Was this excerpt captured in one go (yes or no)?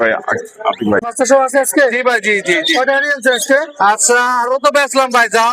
no